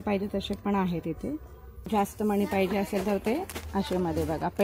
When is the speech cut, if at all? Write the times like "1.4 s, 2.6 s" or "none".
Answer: 1.9 s